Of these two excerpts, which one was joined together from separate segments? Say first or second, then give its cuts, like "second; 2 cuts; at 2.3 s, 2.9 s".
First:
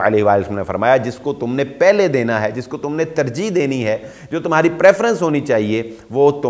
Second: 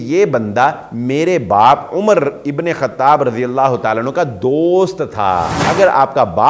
second; 1 cut; at 5.6 s